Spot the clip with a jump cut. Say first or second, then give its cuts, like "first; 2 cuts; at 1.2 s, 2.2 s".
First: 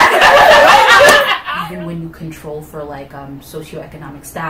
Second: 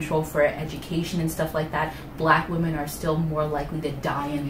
first; 1 cut; at 1.4 s